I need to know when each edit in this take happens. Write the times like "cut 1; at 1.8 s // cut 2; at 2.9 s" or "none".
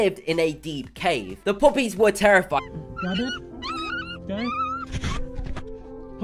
none